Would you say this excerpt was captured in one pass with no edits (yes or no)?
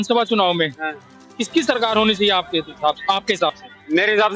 yes